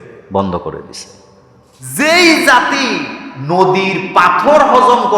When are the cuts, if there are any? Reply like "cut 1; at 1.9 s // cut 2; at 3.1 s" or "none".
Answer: cut 1; at 2.0 s